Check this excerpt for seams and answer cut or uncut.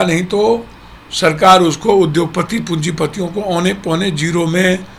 uncut